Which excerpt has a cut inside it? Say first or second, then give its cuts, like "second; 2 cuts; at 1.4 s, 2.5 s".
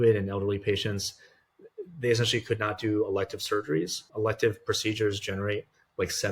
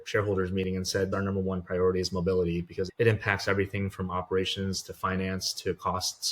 second; 2 cuts; at 1.1 s, 2.9 s